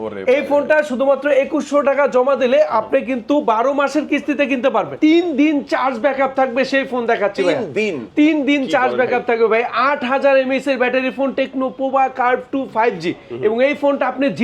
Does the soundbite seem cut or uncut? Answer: cut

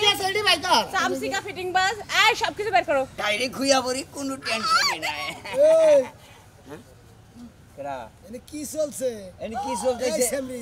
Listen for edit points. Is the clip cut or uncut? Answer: cut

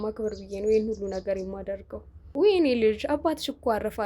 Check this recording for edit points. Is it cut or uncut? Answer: cut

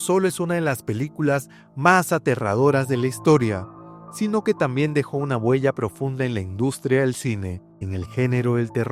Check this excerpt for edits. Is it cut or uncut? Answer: uncut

